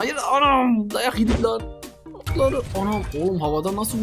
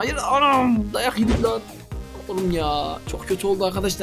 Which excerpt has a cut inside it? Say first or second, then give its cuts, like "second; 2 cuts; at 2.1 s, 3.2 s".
first; 1 cut; at 2.2 s